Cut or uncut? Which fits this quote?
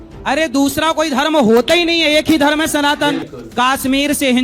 cut